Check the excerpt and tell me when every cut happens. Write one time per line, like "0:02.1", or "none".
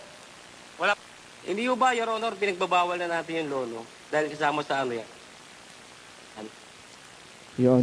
0:01.0